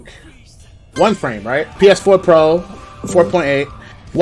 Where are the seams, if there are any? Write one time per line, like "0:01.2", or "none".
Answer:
0:01.7

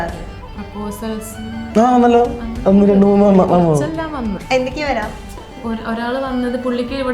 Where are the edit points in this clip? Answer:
0:04.4
0:05.6

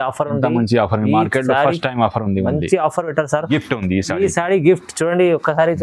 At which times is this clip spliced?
0:03.5

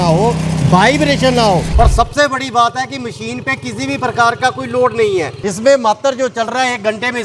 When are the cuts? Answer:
0:01.7
0:05.4

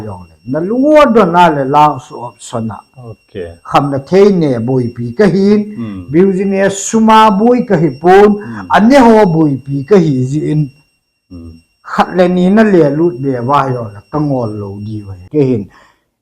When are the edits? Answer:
0:15.2

